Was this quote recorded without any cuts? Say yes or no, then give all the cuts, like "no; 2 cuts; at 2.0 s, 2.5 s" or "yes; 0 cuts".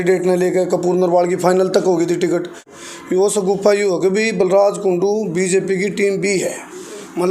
no; 1 cut; at 2.7 s